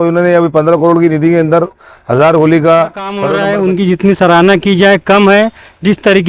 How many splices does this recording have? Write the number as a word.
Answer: one